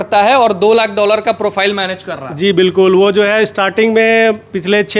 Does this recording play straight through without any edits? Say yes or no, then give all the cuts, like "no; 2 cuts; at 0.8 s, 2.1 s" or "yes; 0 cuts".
yes; 0 cuts